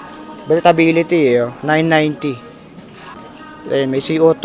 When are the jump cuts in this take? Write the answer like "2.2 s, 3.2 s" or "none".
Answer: 3.2 s